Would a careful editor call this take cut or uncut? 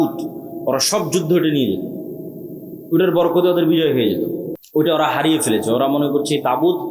cut